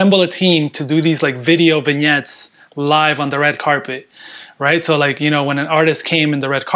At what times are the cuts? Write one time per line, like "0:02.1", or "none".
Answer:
none